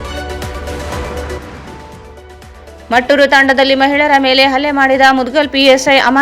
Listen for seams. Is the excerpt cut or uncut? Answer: uncut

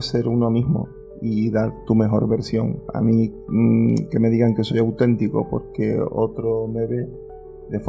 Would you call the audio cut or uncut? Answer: uncut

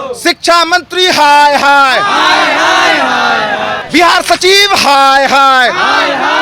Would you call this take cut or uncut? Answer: cut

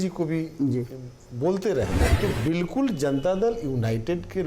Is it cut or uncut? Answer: cut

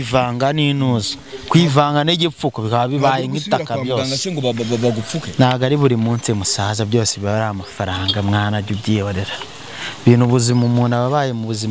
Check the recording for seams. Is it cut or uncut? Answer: uncut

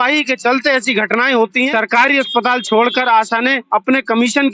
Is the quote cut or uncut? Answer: cut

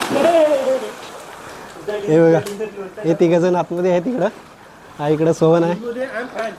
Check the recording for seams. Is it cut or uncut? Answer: uncut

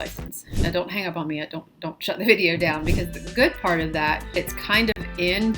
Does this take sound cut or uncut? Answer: cut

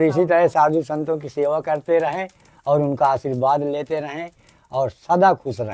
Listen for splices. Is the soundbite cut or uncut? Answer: uncut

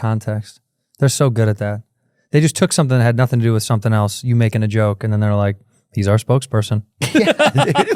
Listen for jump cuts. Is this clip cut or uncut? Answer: uncut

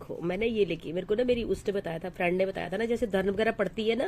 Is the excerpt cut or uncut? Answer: uncut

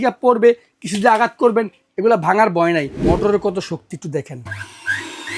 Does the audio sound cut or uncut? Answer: cut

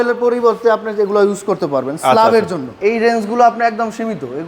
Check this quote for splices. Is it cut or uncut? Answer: cut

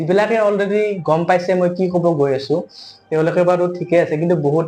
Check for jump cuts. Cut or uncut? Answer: uncut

